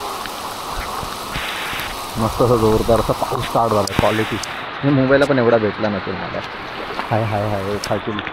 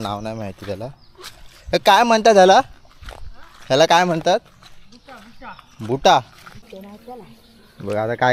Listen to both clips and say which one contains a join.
second; 1 cut; at 6.7 s

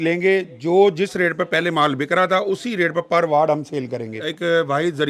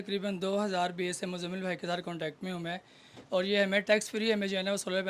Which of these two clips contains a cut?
first; 1 cut; at 4.2 s

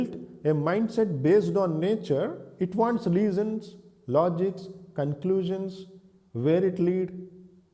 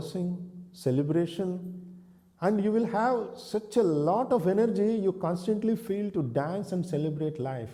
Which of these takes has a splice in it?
first; 1 cut; at 2.4 s

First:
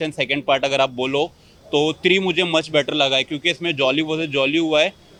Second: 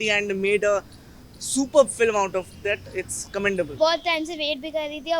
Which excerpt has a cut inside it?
second; 1 cut; at 3.7 s

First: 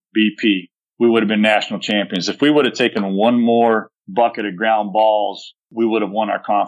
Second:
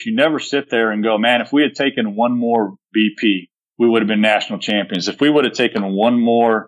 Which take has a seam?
first; 1 cut; at 5.7 s

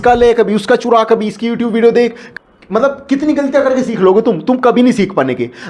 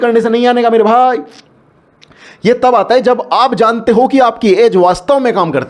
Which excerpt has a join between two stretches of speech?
first; 1 cut; at 2.2 s

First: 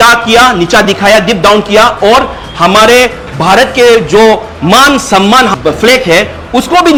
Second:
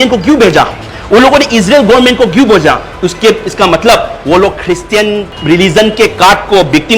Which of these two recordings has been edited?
second; 1 cut; at 5.3 s

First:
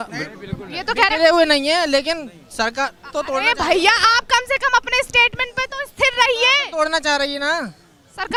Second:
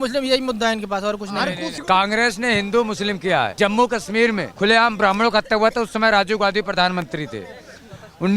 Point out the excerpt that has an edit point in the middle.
second; 3 cuts; at 1.8 s, 3.5 s, 4.5 s

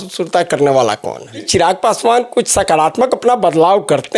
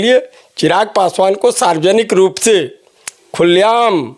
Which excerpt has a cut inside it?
first; 1 cut; at 1.5 s

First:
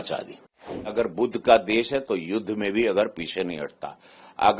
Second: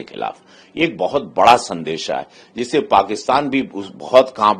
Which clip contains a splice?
first; 1 cut; at 0.9 s

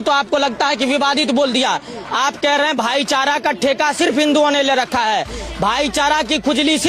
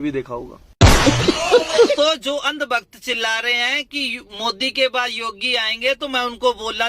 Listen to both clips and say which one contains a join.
second; 1 cut; at 2.0 s

